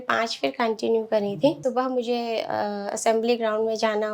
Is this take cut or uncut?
cut